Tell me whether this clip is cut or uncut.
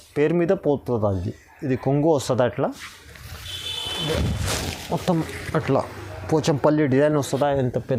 uncut